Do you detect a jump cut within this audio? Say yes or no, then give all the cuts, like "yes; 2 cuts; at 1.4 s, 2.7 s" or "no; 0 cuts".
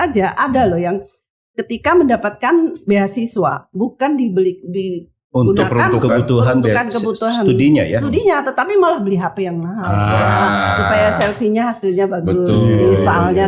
no; 0 cuts